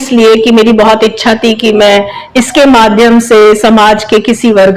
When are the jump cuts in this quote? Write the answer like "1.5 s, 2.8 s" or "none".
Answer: none